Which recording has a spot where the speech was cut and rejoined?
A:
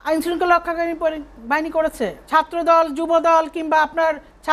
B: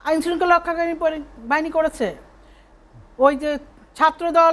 A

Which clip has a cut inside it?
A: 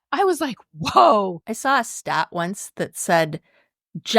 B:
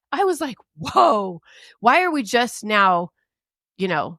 A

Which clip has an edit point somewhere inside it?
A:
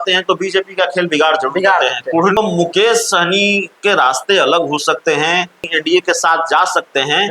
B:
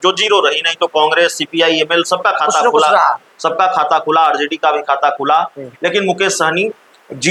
A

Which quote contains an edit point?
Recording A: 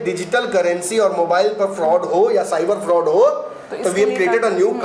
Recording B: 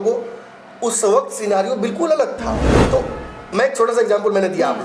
B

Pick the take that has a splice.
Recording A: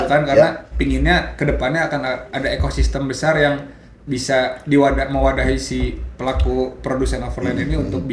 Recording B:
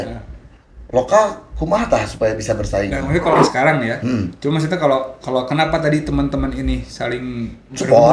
B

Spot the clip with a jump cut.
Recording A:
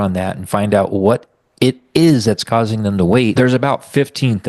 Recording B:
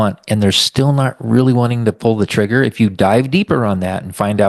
A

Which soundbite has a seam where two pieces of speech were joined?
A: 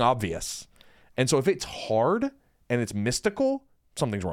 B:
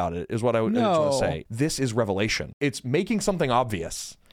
B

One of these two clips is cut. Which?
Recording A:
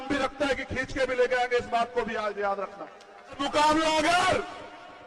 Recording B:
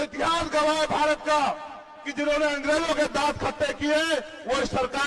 A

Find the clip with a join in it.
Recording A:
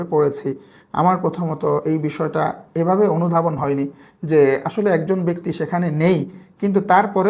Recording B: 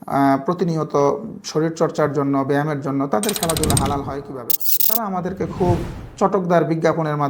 B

